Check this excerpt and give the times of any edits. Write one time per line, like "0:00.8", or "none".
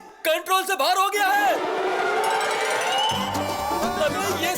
none